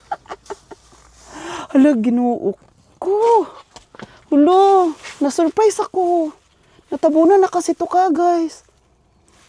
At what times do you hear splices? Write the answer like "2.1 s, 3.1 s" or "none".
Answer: none